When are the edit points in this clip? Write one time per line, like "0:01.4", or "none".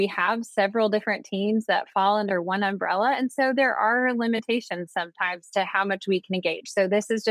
none

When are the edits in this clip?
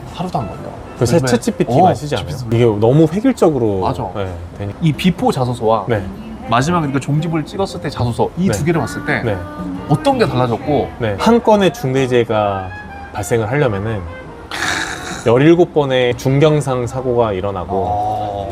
0:02.4
0:04.7
0:11.2
0:16.1

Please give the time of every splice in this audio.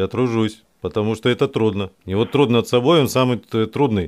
0:02.0

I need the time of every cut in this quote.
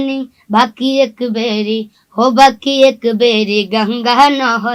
none

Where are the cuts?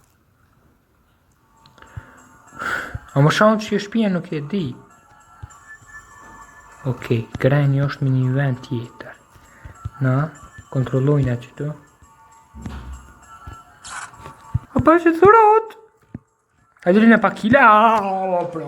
0:14.7

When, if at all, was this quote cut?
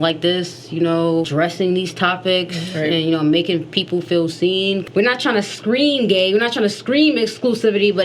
0:01.3
0:04.8

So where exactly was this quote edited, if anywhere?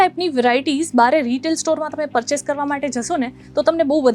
none

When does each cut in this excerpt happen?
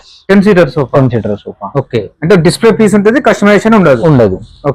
none

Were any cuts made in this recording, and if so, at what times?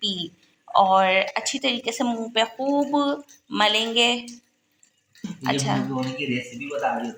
none

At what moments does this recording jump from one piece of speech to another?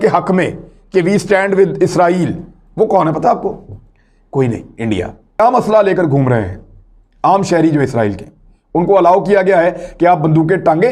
0:05.4

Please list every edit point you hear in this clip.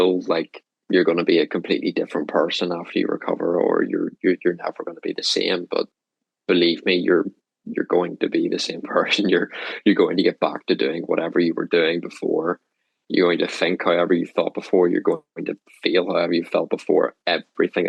none

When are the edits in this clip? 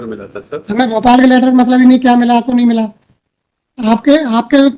none

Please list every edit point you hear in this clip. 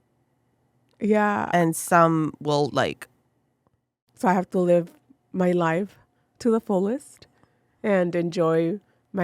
0:04.0

